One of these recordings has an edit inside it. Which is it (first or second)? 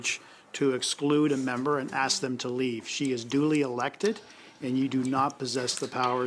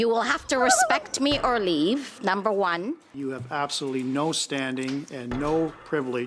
second